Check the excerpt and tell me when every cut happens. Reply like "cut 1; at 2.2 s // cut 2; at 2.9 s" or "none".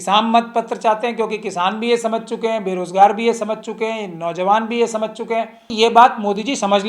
cut 1; at 5.7 s